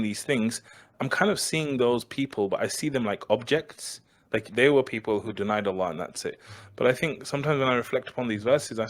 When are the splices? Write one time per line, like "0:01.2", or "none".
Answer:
0:00.9
0:04.5